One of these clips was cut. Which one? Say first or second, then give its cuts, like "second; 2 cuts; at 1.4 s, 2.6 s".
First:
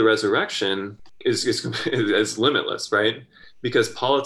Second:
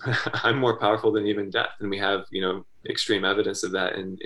first; 1 cut; at 1.0 s